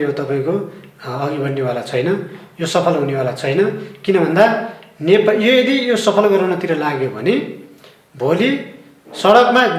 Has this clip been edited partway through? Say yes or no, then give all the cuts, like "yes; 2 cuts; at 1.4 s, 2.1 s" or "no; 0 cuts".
no; 0 cuts